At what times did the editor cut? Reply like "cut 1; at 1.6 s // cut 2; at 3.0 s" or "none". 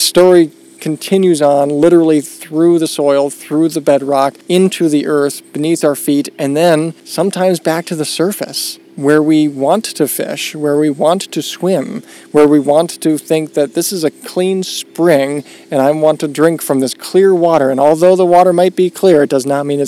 cut 1; at 4.4 s // cut 2; at 7.0 s